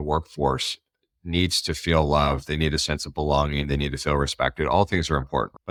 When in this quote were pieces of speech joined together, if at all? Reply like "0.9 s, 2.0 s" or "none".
none